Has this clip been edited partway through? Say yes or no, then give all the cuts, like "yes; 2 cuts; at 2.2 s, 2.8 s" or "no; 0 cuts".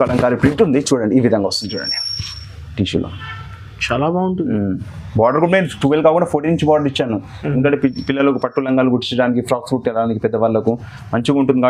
no; 0 cuts